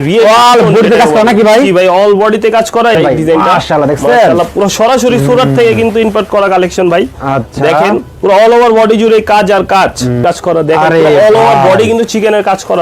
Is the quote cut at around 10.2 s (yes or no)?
yes